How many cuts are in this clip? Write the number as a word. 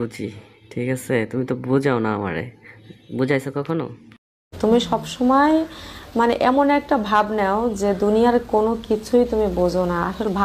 zero